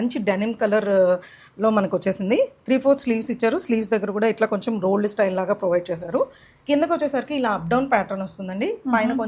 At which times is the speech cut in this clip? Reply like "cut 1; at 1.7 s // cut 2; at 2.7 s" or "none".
none